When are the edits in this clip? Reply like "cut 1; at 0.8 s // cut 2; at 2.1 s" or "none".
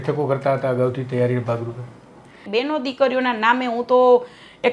cut 1; at 2.4 s